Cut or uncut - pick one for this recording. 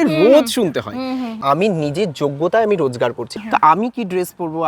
cut